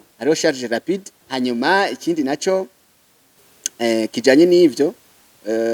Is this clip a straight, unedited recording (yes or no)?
no